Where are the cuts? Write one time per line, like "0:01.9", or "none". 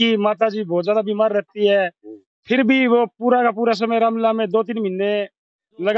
none